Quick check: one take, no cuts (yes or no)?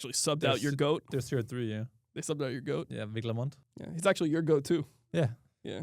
no